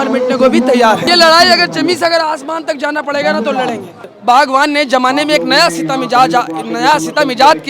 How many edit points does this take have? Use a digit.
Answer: 2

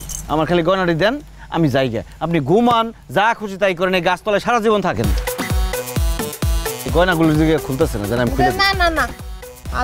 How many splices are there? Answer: 1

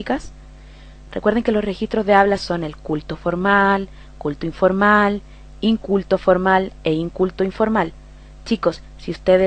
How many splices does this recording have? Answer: 1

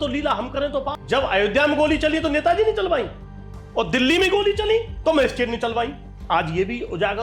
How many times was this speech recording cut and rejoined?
2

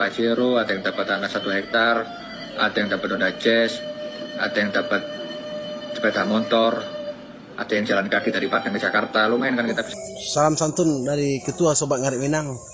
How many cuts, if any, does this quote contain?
1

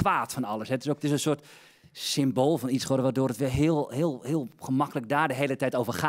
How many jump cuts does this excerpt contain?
1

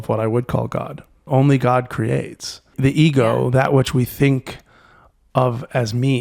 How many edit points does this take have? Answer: 2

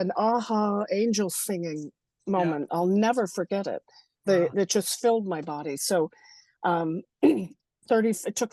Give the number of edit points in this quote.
0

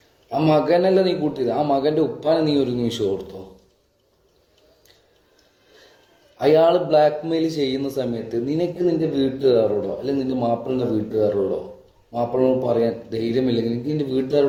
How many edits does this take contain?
0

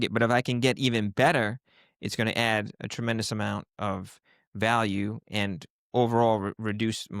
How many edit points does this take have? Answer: 0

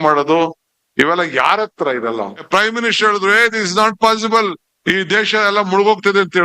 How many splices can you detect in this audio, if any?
1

